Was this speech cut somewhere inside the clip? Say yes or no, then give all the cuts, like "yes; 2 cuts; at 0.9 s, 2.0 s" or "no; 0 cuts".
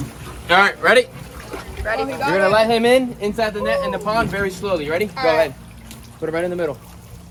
no; 0 cuts